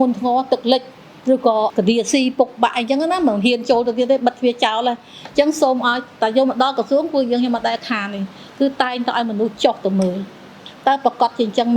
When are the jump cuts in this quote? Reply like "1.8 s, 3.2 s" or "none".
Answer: 1.7 s